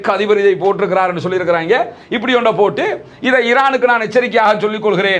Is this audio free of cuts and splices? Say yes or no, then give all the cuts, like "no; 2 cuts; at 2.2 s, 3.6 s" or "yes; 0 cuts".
yes; 0 cuts